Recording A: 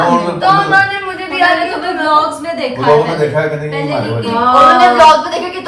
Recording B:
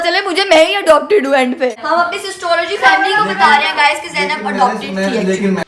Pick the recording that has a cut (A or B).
B